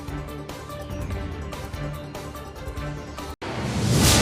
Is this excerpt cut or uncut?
uncut